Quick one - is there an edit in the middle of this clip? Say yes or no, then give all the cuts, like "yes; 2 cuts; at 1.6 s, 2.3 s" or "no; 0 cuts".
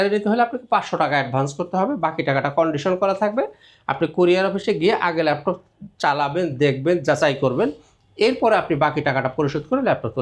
no; 0 cuts